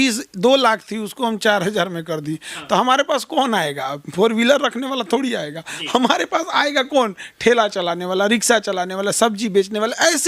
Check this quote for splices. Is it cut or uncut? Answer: uncut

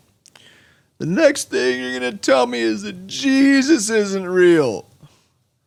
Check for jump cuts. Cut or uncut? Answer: uncut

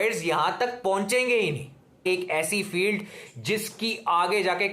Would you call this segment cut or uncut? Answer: cut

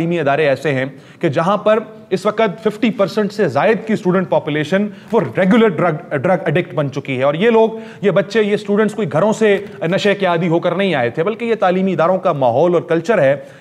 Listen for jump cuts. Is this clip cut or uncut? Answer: uncut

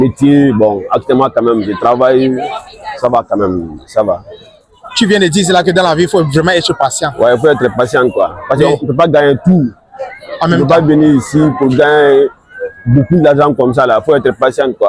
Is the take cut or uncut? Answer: uncut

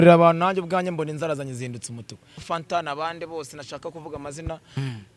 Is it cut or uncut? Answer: cut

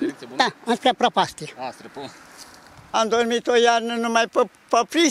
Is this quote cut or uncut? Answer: cut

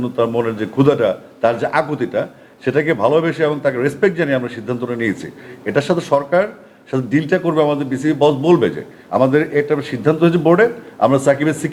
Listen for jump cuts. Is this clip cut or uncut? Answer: uncut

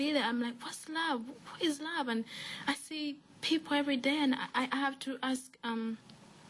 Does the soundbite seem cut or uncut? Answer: uncut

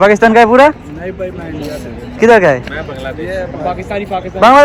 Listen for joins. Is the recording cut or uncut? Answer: uncut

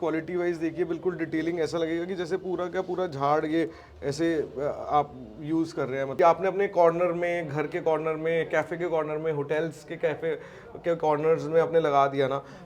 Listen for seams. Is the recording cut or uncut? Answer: cut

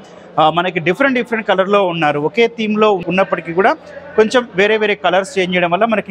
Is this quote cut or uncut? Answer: uncut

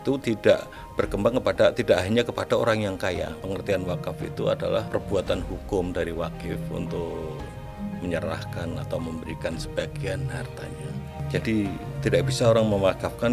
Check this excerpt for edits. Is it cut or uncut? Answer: cut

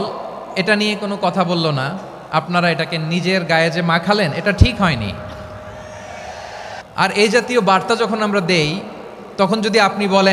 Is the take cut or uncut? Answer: cut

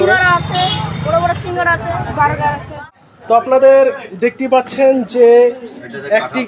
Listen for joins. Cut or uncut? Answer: cut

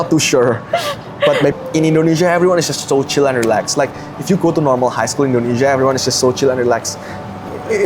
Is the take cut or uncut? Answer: cut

